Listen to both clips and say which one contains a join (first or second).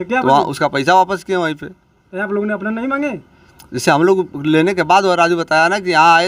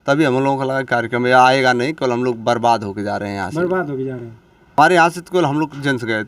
second